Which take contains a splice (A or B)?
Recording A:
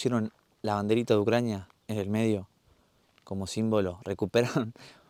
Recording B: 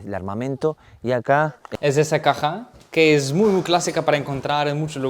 B